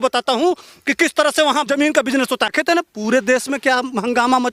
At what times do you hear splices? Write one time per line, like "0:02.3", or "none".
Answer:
0:01.7
0:02.5